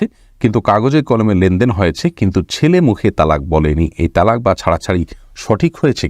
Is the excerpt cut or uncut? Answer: uncut